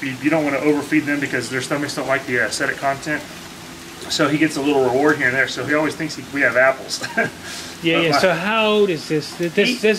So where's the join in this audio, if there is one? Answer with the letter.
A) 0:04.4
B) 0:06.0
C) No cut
B